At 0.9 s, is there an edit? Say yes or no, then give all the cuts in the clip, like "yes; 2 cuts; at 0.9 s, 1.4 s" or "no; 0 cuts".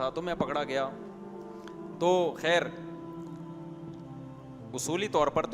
no; 2 cuts; at 3.1 s, 4.7 s